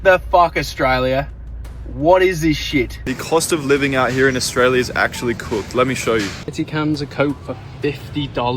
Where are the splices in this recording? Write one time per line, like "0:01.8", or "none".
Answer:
0:03.0
0:06.4